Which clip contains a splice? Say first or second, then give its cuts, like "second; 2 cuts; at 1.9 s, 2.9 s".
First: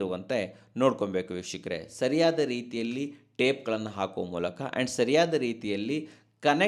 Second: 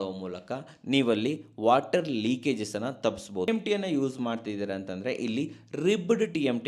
second; 1 cut; at 3.5 s